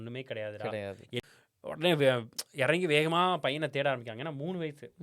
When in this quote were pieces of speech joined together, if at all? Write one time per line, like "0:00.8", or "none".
0:01.2

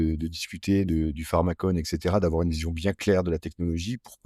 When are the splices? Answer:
none

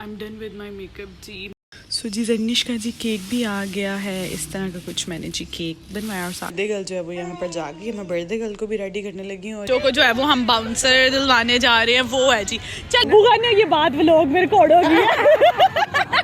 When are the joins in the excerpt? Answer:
0:01.5
0:06.5
0:09.6
0:13.0

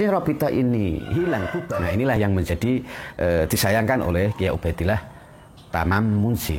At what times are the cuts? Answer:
0:02.2

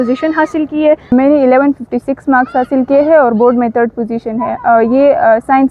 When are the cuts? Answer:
0:01.1

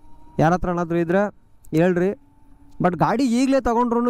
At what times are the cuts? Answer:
none

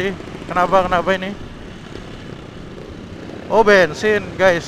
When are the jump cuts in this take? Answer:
none

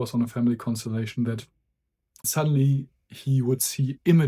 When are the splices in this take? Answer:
0:02.3

